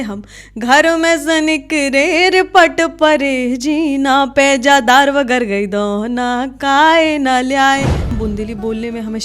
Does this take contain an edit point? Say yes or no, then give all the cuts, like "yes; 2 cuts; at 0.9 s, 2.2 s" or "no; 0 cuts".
yes; 1 cut; at 8.1 s